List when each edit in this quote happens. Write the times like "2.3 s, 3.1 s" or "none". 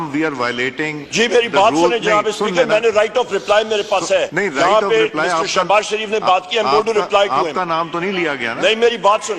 1.0 s, 4.3 s